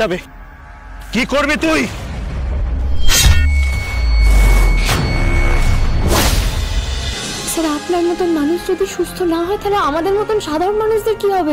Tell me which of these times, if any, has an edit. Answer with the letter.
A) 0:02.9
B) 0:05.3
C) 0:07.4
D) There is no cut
C